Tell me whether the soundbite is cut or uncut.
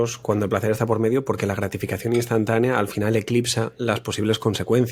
uncut